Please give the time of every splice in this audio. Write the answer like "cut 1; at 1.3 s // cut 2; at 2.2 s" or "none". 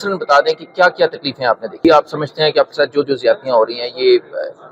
cut 1; at 1.8 s